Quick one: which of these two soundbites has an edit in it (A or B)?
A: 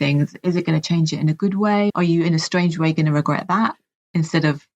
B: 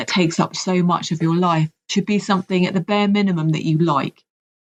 A